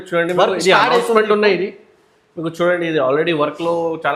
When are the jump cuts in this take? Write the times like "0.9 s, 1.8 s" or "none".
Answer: none

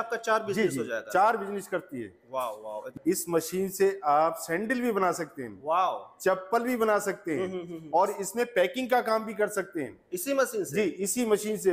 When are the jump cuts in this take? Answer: 2.9 s

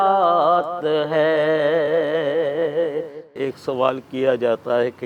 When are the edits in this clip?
3.4 s

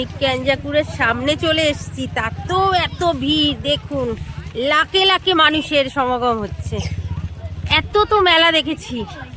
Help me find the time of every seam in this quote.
none

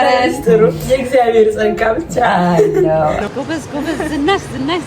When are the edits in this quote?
3.2 s

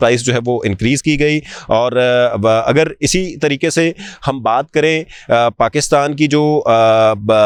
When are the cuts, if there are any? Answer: none

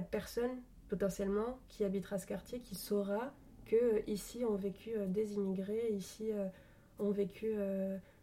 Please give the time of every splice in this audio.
none

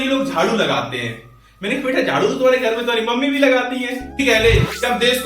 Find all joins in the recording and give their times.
4.2 s

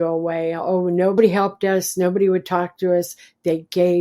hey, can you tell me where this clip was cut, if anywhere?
1.2 s

